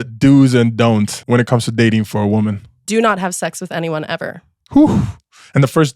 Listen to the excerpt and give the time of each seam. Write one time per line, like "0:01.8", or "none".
0:01.2